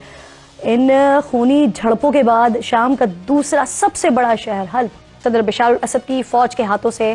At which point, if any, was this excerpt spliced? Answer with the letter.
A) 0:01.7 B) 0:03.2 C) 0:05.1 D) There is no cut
C